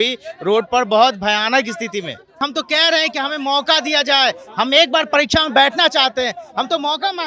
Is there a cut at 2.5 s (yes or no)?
yes